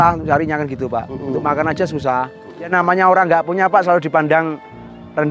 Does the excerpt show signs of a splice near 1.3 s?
no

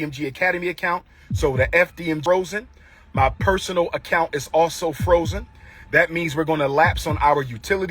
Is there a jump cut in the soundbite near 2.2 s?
yes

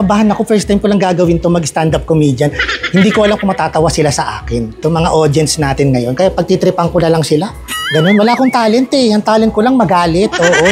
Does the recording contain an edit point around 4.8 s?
yes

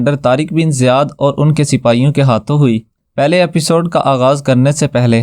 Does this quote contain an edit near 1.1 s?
no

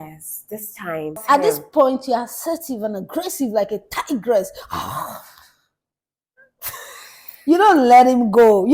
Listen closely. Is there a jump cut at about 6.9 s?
no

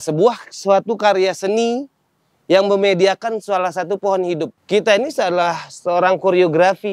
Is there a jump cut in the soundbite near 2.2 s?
no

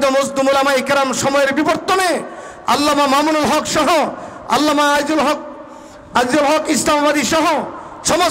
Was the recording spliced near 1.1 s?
no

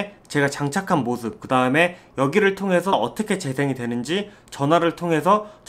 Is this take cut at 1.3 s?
no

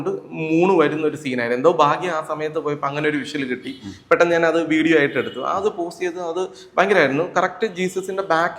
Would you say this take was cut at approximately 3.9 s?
no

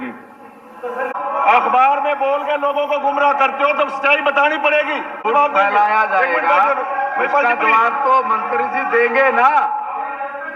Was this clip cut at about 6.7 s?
no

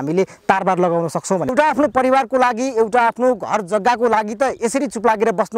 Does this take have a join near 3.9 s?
no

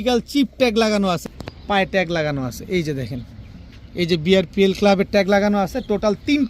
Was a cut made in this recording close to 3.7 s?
no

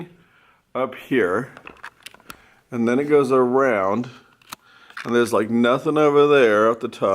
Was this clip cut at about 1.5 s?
no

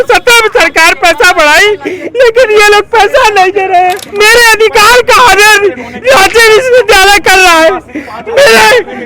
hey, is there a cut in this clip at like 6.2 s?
no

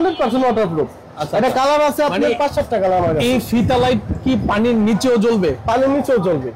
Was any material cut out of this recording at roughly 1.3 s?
no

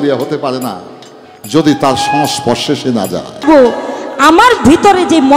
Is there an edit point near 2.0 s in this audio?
no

